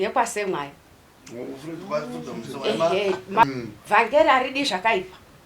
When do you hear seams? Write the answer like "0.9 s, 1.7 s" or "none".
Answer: 3.4 s